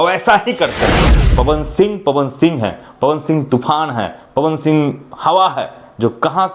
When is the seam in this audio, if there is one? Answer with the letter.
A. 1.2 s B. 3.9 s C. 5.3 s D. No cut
A